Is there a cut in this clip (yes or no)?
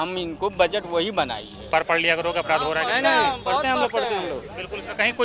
yes